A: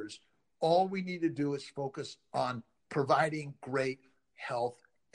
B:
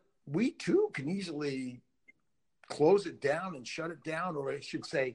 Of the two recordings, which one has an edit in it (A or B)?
A